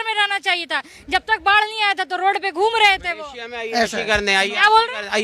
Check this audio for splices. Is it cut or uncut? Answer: uncut